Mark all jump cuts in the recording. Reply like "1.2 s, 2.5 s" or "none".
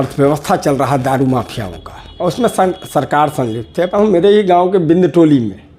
3.9 s